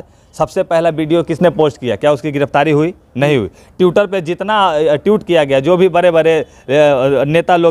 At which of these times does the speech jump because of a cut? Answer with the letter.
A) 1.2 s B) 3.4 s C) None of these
C